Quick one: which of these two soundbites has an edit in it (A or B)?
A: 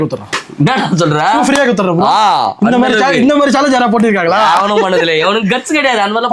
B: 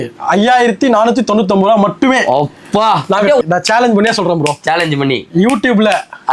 B